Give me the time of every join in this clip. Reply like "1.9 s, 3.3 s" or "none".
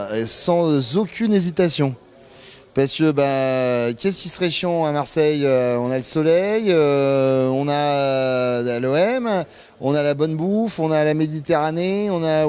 8.3 s